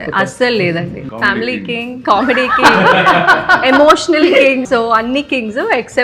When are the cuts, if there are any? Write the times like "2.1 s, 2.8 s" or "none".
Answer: 1.1 s, 4.7 s